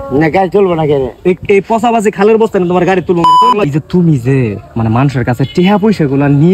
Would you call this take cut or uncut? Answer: cut